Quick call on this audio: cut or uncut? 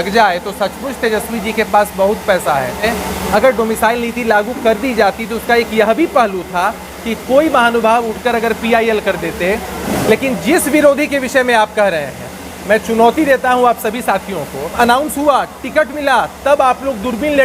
cut